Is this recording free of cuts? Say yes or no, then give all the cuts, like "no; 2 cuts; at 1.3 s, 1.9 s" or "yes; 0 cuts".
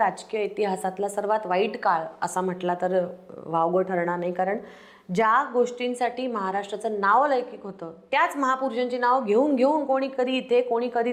yes; 0 cuts